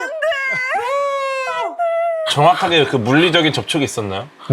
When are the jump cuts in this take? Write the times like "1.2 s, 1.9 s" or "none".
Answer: 2.3 s